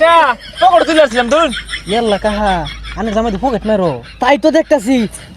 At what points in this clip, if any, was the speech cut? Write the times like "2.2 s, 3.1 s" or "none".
1.7 s